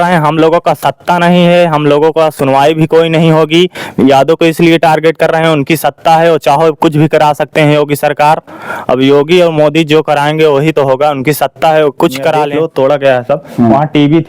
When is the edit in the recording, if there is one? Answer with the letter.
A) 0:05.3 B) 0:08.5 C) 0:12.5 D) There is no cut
C